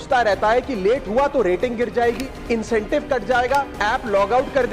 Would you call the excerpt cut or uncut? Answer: cut